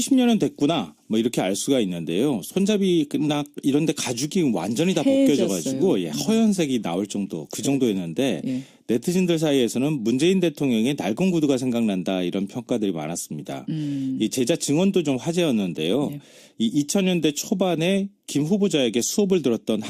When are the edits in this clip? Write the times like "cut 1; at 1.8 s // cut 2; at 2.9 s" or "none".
cut 1; at 10.4 s